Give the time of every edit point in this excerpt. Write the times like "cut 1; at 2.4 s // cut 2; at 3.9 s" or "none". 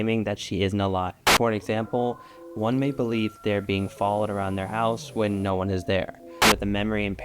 cut 1; at 1.2 s // cut 2; at 6.4 s